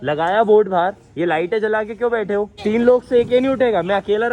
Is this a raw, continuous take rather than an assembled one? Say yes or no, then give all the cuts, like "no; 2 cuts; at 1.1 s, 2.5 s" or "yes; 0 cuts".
no; 1 cut; at 2.5 s